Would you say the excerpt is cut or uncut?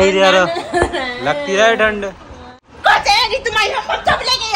cut